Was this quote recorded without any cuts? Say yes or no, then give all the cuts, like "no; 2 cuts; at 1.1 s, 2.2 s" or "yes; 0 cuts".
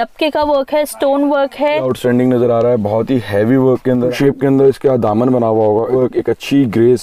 no; 3 cuts; at 1.9 s, 4.1 s, 5.9 s